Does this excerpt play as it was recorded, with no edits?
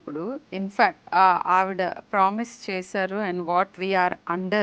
no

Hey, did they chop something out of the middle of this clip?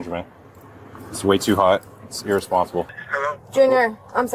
yes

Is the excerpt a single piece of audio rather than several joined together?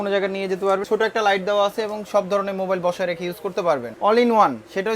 no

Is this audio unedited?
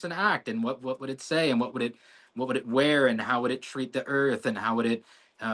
yes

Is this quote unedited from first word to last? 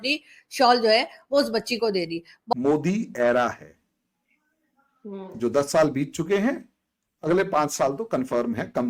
no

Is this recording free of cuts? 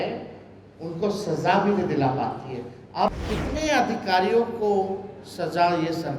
no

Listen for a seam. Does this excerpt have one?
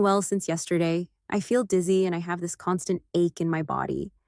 yes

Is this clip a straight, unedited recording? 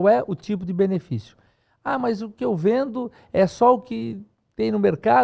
yes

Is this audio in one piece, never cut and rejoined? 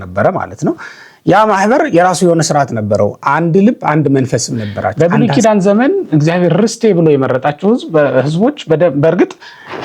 no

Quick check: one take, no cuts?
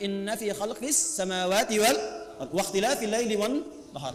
yes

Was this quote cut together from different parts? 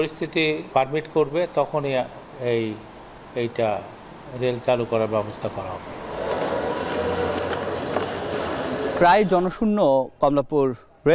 no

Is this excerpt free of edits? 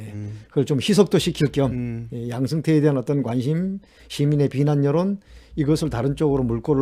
yes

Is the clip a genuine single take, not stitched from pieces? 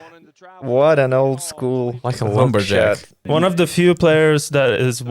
no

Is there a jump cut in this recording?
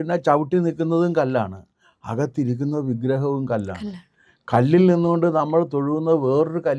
no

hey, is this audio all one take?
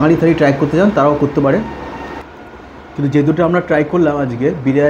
yes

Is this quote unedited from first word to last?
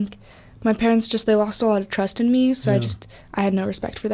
yes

